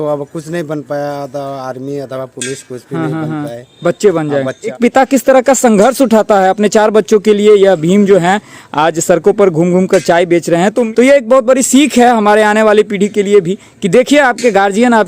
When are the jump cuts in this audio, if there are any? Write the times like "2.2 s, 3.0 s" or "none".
4.7 s, 10.8 s